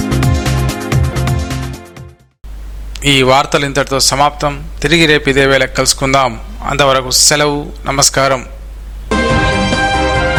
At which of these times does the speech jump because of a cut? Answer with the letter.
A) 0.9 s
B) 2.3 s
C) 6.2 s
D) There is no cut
D